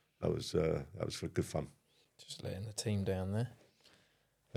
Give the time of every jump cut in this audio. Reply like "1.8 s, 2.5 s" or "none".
none